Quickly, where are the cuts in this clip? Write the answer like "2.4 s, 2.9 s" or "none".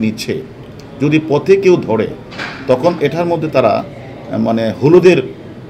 none

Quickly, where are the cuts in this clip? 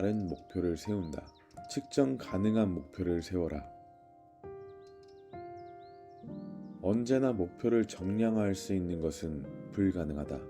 3.6 s, 6.2 s

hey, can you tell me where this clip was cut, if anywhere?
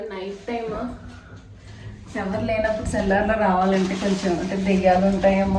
none

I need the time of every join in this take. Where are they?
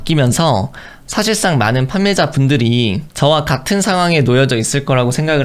none

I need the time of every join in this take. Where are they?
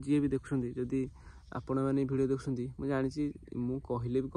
none

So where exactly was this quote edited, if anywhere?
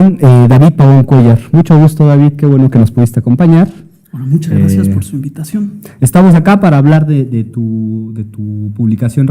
2.6 s

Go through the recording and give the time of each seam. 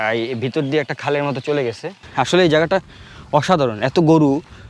2.0 s

